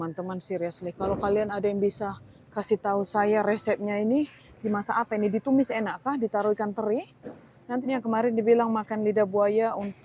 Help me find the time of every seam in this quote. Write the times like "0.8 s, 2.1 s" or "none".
7.8 s